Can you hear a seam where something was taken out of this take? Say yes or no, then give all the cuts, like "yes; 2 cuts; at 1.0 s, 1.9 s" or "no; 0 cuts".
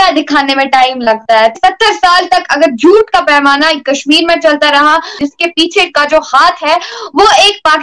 yes; 2 cuts; at 1.5 s, 5.1 s